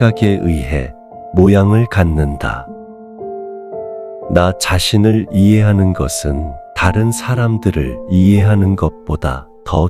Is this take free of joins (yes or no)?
no